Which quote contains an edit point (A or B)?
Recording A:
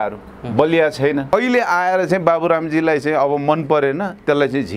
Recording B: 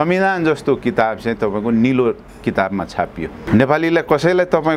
A